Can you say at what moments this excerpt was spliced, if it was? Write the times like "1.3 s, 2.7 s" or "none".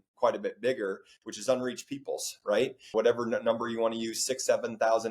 2.9 s